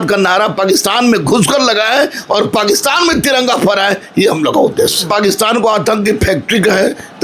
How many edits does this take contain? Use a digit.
1